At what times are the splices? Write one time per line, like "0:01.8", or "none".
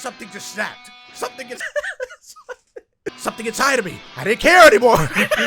0:01.7